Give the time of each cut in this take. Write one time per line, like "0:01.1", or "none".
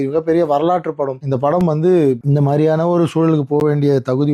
0:01.2
0:02.2